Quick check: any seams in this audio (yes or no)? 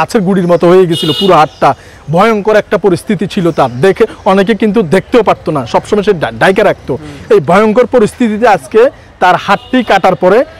no